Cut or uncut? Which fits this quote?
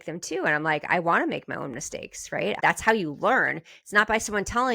cut